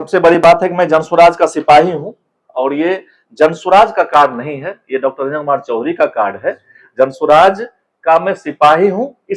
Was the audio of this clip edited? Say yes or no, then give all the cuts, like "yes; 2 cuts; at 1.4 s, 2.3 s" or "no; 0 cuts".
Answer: no; 0 cuts